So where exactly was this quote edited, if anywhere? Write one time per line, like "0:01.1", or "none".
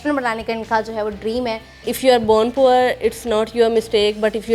0:01.9